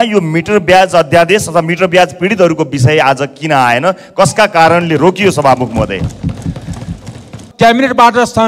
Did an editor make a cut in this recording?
yes; 1 cut; at 7.4 s

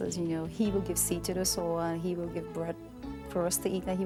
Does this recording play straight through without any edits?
yes; 0 cuts

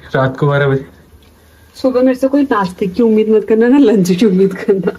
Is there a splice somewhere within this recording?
no; 0 cuts

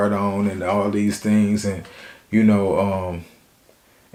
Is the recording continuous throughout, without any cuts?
yes; 0 cuts

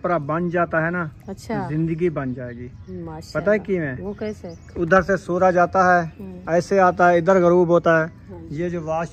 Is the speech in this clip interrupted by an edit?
no; 0 cuts

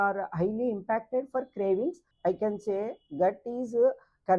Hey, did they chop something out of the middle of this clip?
yes; 1 cut; at 2.1 s

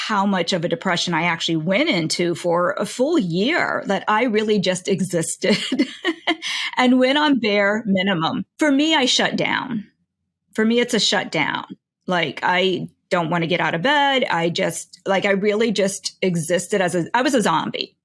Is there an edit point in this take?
yes; 1 cut; at 8.4 s

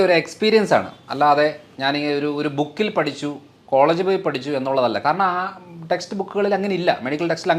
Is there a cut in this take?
no; 0 cuts

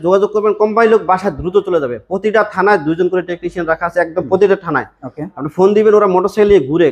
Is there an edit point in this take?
no; 0 cuts

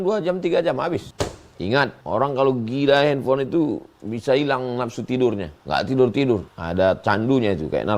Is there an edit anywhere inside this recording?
yes; 4 cuts; at 1.1 s, 2.0 s, 5.5 s, 6.6 s

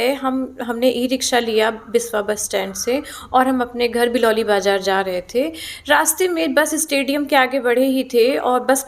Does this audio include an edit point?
no; 0 cuts

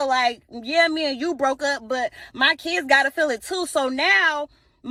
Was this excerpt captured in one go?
yes; 0 cuts

